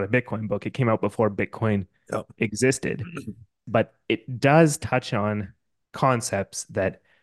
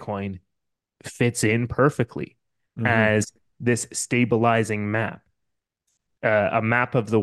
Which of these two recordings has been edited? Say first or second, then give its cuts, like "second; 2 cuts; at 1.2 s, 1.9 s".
first; 1 cut; at 3.6 s